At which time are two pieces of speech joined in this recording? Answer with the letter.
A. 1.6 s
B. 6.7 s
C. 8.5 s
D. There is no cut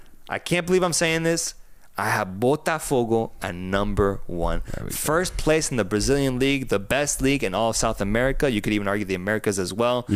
D